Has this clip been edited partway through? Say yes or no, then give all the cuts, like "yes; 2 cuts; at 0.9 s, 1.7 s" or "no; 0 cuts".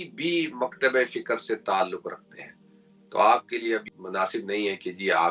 no; 0 cuts